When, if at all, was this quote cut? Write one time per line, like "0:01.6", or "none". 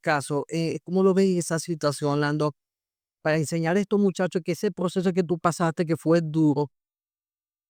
none